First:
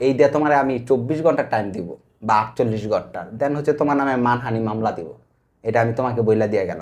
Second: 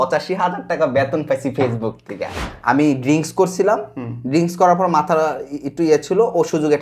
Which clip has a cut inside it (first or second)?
second